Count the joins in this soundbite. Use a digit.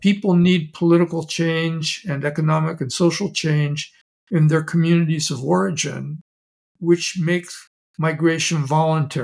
0